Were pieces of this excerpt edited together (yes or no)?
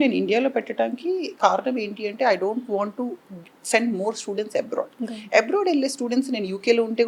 no